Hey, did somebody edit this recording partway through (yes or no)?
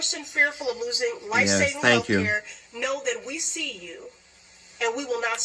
no